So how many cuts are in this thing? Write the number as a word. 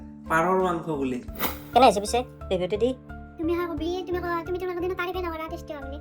one